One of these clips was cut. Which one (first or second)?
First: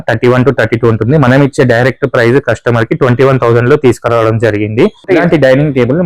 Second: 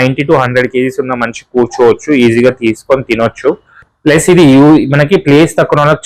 first